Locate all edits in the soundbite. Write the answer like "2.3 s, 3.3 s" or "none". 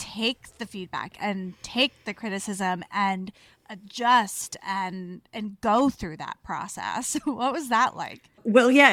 none

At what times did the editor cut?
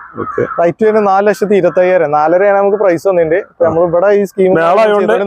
none

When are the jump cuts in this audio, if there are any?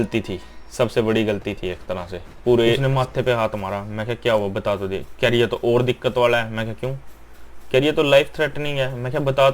2.8 s

